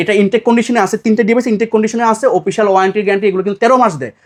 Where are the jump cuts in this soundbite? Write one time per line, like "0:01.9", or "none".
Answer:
none